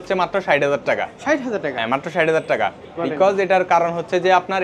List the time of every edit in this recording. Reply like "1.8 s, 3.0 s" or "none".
none